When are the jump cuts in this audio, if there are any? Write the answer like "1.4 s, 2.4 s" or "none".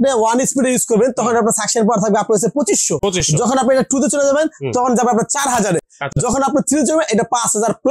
none